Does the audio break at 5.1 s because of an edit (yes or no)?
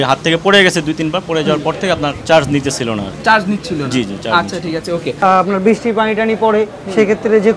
yes